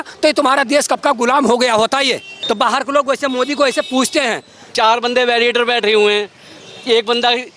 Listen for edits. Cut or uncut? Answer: cut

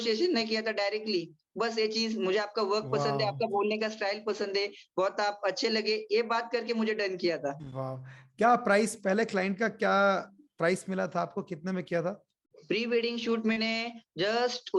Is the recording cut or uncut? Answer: uncut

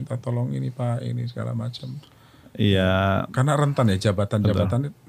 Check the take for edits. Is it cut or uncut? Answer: uncut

